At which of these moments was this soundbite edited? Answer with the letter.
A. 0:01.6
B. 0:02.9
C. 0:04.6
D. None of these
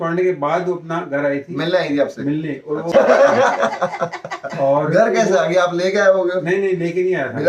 B